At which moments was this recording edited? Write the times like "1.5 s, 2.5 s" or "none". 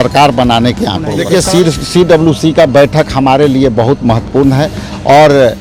1.2 s